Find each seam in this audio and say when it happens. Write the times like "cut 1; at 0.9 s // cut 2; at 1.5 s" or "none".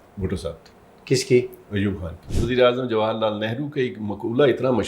cut 1; at 2.1 s